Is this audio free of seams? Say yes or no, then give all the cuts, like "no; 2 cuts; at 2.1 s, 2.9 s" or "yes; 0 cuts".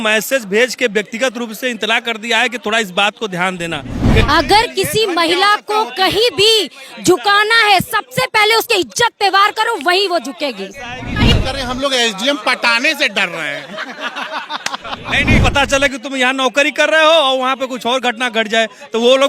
no; 3 cuts; at 4.2 s, 11.3 s, 15.4 s